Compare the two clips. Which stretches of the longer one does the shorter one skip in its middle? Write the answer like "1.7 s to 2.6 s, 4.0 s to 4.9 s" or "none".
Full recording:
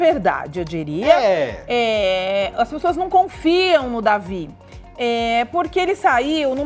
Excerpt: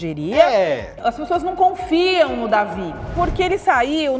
1.7 s to 2.5 s, 4.7 s to 5.5 s